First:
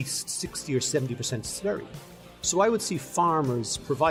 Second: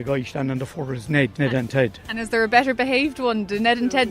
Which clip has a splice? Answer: second; 1 cut; at 1.3 s

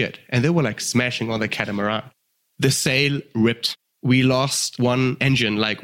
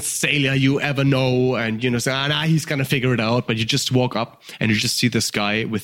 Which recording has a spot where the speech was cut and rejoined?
first; 3 cuts; at 2.3 s, 3.9 s, 4.9 s

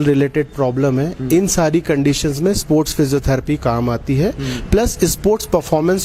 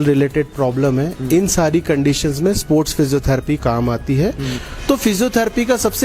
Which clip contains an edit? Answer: second; 1 cut; at 4.5 s

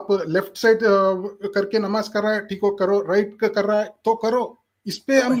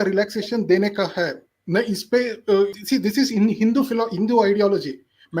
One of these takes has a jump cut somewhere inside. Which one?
second; 1 cut; at 2.8 s

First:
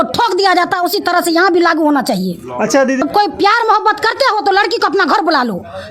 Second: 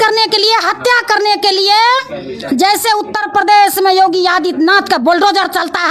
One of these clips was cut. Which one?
first; 1 cut; at 3.0 s

